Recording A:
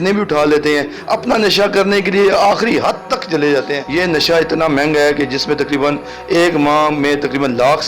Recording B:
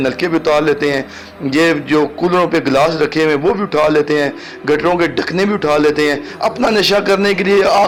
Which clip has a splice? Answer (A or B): A